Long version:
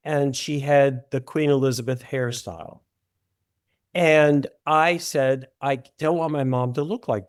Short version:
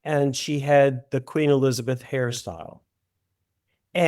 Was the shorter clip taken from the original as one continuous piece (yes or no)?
yes